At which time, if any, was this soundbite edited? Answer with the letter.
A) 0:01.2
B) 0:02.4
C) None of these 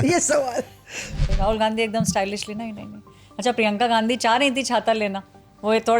A